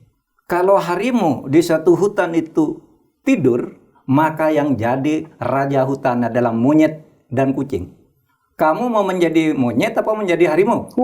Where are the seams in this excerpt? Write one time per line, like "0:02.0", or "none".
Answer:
none